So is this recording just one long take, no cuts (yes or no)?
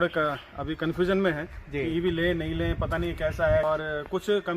no